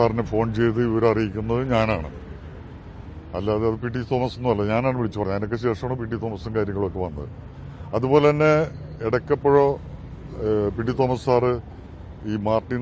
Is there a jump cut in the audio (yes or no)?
no